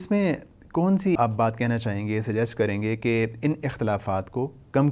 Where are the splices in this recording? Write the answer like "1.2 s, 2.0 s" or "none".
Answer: 1.2 s